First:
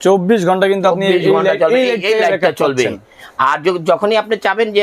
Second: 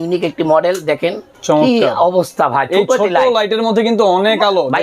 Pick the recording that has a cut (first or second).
second